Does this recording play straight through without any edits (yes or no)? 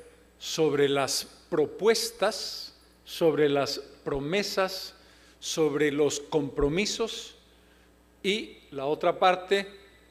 yes